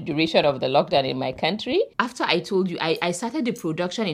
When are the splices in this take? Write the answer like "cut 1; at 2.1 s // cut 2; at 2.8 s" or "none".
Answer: cut 1; at 1.9 s

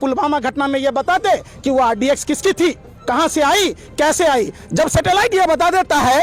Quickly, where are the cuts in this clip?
none

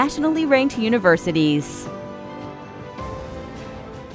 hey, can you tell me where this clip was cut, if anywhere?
cut 1; at 1.7 s

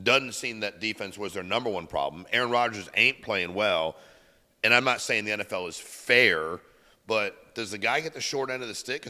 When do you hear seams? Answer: none

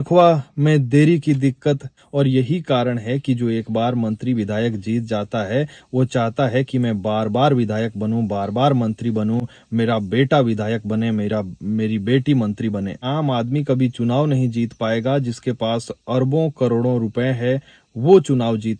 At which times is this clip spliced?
cut 1; at 2.0 s // cut 2; at 13.1 s

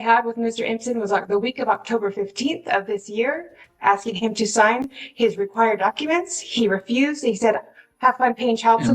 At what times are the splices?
cut 1; at 6.3 s

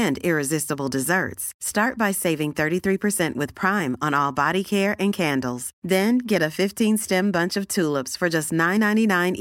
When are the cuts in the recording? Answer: none

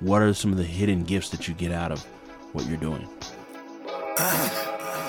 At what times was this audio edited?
cut 1; at 3.1 s

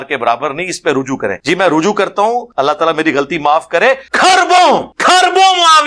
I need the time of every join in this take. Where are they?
cut 1; at 1.4 s // cut 2; at 2.5 s // cut 3; at 4.1 s // cut 4; at 4.9 s

